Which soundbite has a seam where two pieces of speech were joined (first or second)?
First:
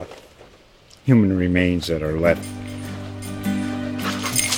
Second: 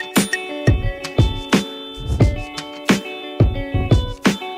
second